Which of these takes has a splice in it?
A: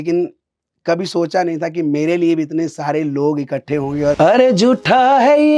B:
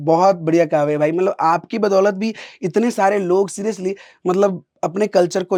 A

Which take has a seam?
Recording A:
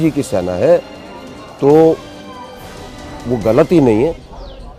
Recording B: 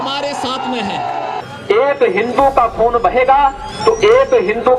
B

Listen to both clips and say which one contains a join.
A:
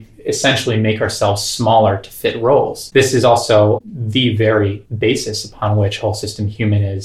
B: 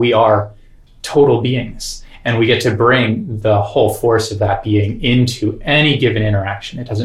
A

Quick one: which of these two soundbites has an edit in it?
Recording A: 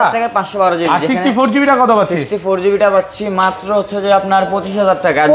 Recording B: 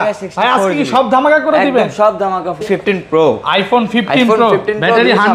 B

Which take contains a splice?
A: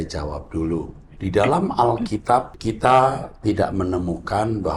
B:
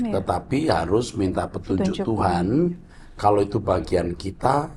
A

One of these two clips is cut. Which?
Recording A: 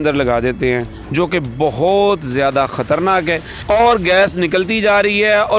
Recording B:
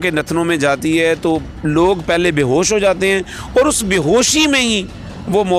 A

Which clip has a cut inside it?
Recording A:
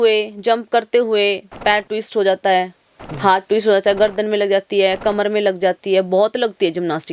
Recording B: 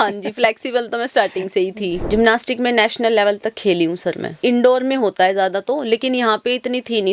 B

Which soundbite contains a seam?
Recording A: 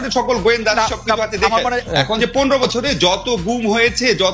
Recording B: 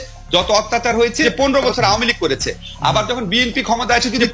A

